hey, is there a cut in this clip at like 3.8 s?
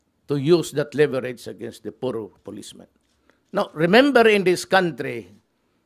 yes; 1 cut; at 3.8 s

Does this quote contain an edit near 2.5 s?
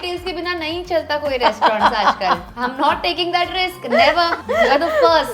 yes; 2 cuts; at 2.5 s, 4.4 s

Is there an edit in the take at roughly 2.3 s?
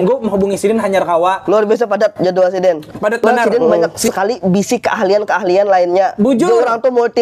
no; 1 cut; at 4.1 s

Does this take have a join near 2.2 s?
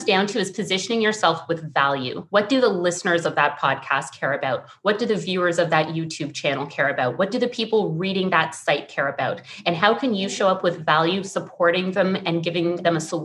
yes; 1 cut; at 2.2 s

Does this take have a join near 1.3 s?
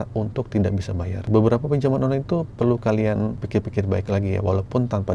yes; 2 cuts; at 1.3 s, 3.4 s

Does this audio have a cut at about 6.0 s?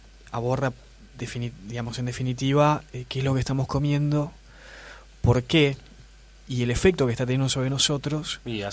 no; 1 cut; at 3.4 s

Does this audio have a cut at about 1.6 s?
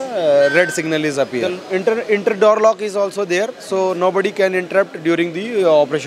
yes; 1 cut; at 1.6 s

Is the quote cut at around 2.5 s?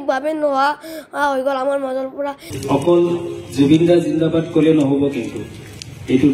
yes; 1 cut; at 2.5 s

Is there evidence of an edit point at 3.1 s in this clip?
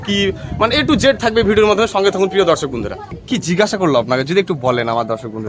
yes; 1 cut; at 3.1 s

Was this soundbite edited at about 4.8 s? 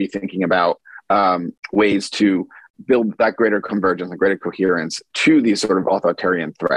no; 2 cuts; at 1.6 s, 2.6 s

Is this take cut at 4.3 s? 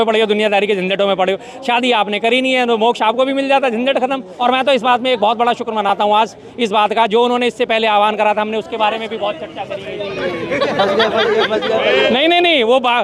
yes; 2 cuts; at 4.3 s, 12.1 s

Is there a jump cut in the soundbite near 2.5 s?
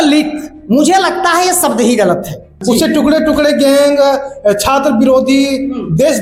yes; 1 cut; at 2.5 s

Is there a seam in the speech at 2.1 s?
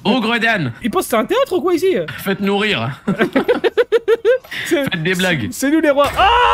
yes; 2 cuts; at 0.8 s, 2.1 s

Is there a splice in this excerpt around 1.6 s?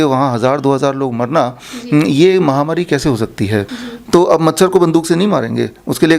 no; 1 cut; at 3.8 s

